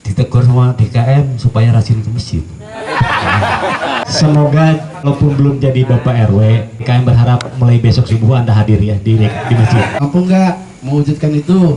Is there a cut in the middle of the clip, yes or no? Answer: yes